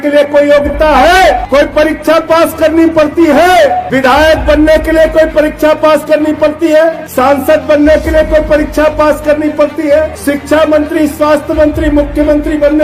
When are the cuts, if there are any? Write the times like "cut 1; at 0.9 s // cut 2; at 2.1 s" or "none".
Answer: cut 1; at 1.4 s // cut 2; at 3.9 s // cut 3; at 7.0 s // cut 4; at 10.1 s